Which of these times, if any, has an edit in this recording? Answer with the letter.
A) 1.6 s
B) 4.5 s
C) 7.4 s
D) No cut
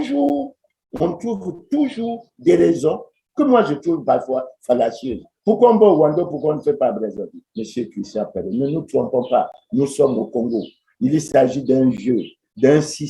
C